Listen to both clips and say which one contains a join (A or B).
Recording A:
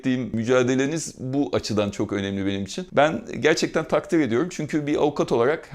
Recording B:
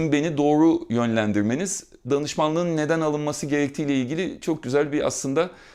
A